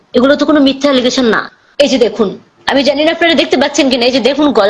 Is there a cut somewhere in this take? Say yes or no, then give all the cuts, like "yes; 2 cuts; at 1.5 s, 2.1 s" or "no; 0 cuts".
yes; 1 cut; at 1.5 s